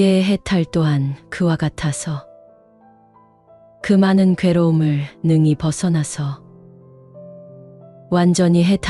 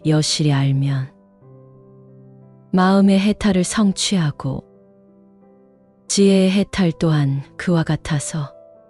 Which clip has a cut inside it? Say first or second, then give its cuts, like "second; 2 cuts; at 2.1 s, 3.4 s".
second; 2 cuts; at 1.1 s, 2.7 s